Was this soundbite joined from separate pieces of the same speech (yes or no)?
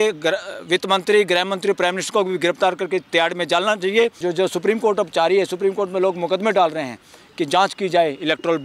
yes